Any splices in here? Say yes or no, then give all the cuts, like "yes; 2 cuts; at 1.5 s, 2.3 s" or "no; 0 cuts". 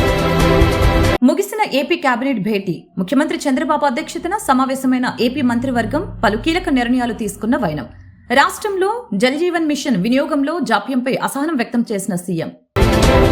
yes; 1 cut; at 1.2 s